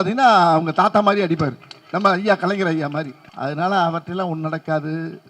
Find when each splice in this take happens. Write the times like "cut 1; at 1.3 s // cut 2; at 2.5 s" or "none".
cut 1; at 3.2 s